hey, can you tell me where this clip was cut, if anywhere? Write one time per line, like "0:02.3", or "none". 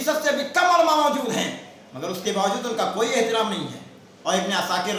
0:04.0